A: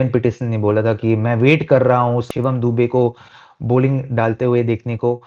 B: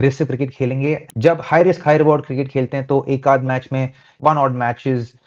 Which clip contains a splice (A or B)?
B